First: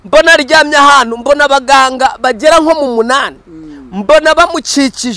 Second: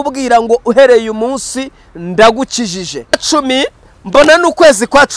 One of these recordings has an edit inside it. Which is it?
second; 1 cut; at 3.2 s

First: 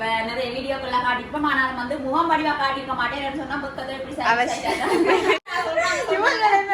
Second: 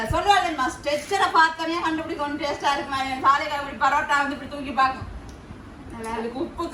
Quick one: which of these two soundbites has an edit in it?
first; 1 cut; at 5.5 s

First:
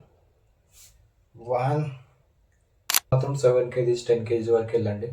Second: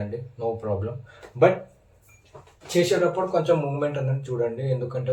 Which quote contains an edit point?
first; 1 cut; at 3.1 s

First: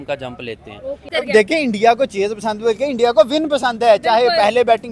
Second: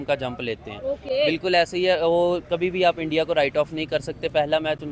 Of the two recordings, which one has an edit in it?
first; 1 cut; at 1.0 s

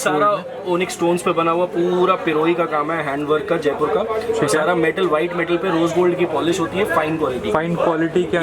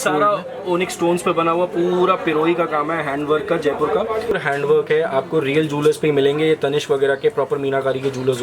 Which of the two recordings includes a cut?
second; 1 cut; at 4.3 s

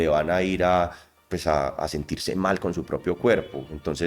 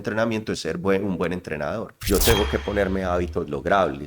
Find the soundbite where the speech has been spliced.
second; 1 cut; at 1.9 s

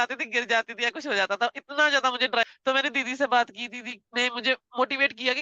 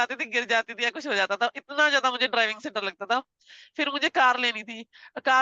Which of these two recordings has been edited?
first; 1 cut; at 2.5 s

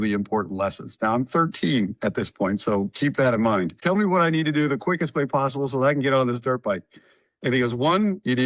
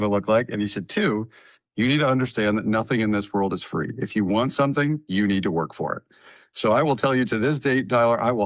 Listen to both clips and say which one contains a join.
first; 1 cut; at 3.8 s

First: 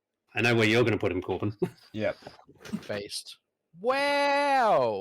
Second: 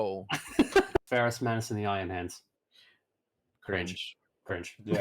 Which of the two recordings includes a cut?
second; 1 cut; at 1.1 s

